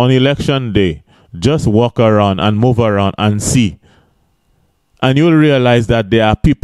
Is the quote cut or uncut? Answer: uncut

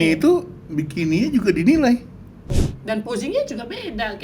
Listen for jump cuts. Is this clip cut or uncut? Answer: cut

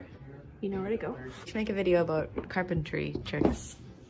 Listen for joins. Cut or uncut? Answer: uncut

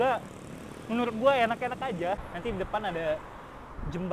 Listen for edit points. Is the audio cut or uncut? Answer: cut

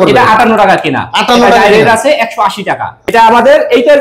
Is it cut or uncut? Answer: cut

